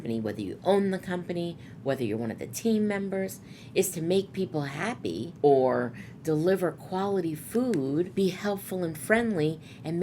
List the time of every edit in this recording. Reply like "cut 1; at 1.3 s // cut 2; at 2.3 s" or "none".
cut 1; at 5.3 s // cut 2; at 8.1 s